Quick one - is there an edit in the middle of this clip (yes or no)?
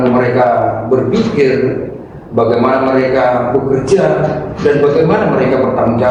no